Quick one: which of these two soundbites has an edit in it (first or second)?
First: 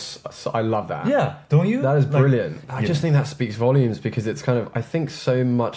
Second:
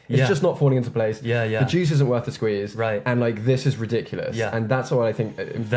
first